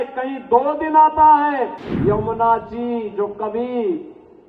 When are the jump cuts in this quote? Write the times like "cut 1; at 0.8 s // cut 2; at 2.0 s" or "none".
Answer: cut 1; at 1.8 s

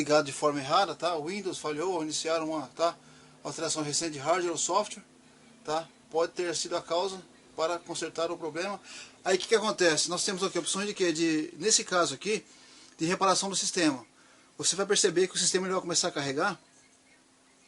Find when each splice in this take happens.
cut 1; at 7.4 s

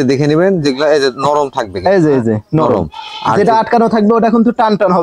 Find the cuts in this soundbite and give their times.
none

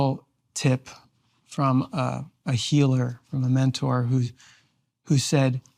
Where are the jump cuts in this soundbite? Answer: none

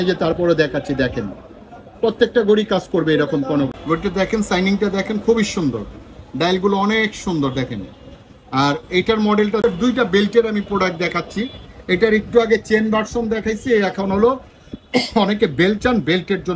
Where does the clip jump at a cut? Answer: cut 1; at 3.8 s // cut 2; at 9.6 s

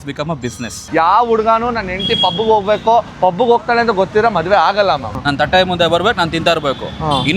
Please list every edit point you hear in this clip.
cut 1; at 0.9 s // cut 2; at 5.1 s

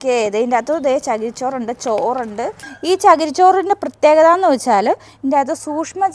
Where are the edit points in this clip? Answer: cut 1; at 2.6 s

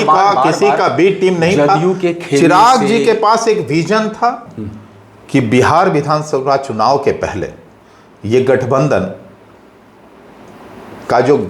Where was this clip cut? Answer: cut 1; at 4.5 s

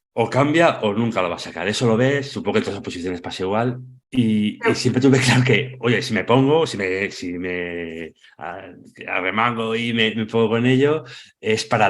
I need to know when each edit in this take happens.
cut 1; at 3.9 s

